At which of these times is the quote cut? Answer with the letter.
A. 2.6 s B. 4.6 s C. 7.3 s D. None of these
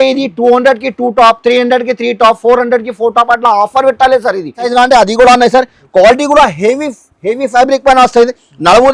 B